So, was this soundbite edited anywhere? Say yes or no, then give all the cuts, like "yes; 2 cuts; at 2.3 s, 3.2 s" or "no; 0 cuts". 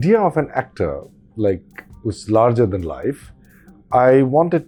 no; 0 cuts